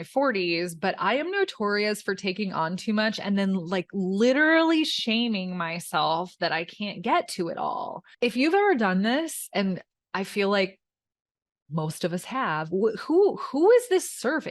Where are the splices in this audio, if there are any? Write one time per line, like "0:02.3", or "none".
0:08.0